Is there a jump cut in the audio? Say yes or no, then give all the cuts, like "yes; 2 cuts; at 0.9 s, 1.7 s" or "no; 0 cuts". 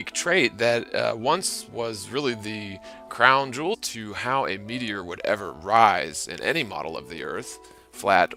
no; 0 cuts